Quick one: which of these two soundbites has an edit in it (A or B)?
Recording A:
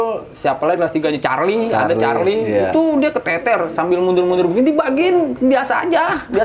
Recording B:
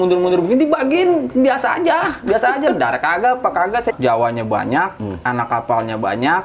B